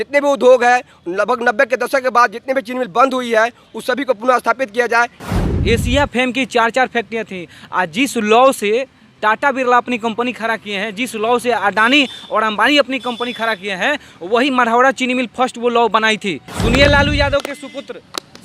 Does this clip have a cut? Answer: yes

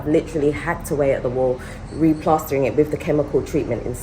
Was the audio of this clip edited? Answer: no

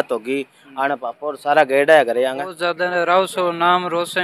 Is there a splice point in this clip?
yes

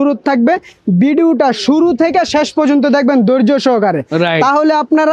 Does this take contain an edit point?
no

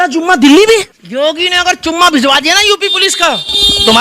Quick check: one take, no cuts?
no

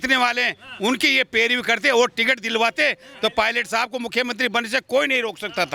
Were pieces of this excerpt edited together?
no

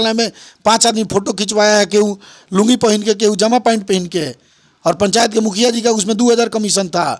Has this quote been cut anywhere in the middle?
no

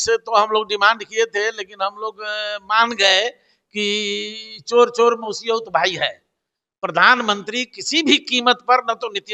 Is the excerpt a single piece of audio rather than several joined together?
yes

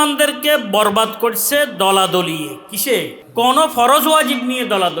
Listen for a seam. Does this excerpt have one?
yes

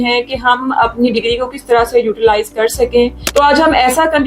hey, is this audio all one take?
no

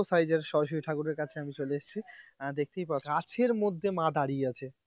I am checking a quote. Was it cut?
yes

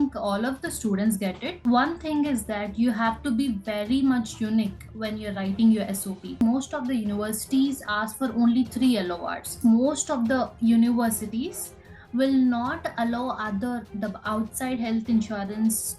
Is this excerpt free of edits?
no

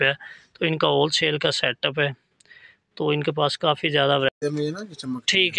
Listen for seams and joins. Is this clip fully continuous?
no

